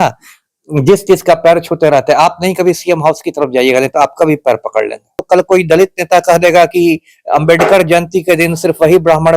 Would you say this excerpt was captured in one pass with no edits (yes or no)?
no